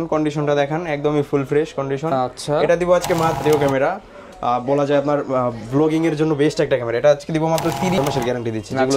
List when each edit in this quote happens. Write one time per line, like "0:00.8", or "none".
0:03.4
0:08.0

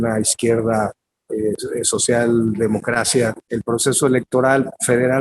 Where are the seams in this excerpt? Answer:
0:03.5

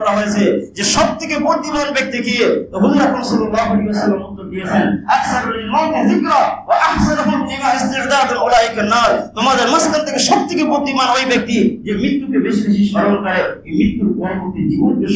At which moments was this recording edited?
none

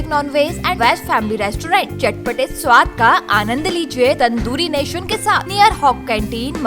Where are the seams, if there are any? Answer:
0:00.8
0:04.2
0:05.5

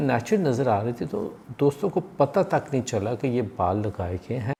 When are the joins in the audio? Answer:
none

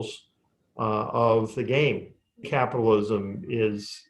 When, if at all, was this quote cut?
0:02.5

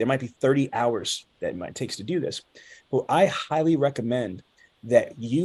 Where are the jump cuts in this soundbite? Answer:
none

